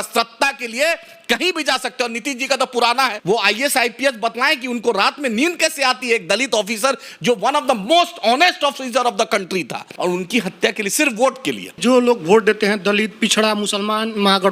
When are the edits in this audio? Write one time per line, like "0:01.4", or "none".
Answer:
0:03.2
0:09.9
0:11.8